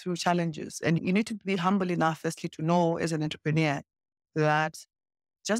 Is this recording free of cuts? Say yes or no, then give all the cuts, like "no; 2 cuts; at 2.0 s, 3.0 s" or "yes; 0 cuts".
no; 1 cut; at 1.0 s